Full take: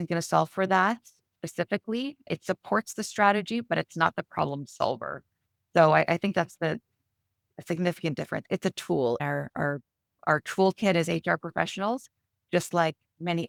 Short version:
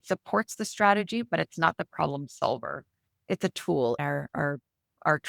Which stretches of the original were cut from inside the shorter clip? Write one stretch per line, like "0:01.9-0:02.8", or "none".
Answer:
0:05.6-0:08.4